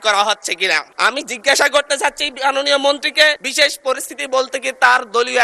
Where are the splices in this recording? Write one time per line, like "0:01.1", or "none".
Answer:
0:00.9
0:03.4